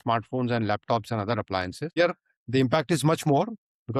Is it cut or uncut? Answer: cut